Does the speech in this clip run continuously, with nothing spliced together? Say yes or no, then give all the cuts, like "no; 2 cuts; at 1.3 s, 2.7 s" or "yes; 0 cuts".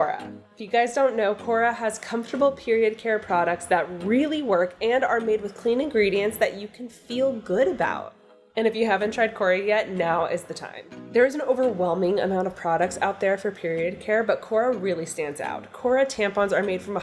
yes; 0 cuts